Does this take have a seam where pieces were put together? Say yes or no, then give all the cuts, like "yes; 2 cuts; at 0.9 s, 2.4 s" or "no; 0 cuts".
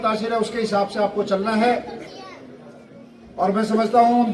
no; 0 cuts